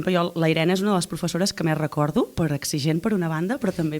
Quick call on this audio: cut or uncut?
uncut